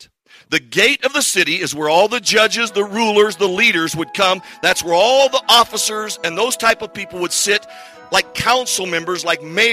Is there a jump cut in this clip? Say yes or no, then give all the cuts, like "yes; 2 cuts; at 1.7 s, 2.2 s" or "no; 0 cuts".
no; 0 cuts